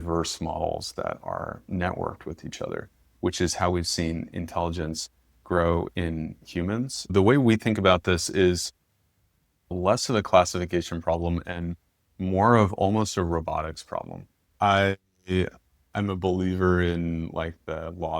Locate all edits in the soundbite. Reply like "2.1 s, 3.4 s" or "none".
7.1 s, 9.7 s, 14.5 s